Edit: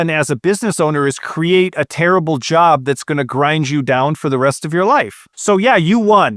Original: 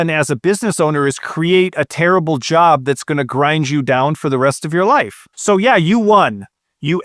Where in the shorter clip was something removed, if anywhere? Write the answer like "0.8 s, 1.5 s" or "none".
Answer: none